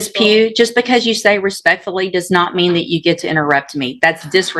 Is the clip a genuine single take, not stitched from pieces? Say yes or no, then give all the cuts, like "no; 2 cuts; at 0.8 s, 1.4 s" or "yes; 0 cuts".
yes; 0 cuts